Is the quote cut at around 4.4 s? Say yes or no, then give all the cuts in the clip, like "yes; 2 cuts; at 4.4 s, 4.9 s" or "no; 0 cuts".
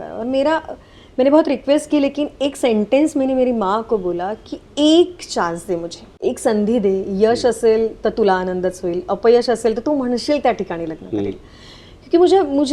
no; 1 cut; at 6.2 s